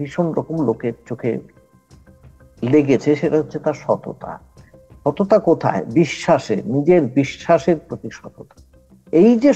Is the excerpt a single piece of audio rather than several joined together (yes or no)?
yes